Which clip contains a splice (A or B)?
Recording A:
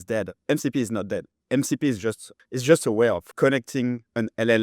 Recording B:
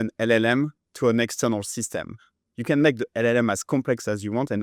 A